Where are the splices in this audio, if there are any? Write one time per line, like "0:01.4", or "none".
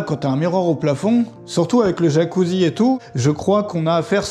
0:03.0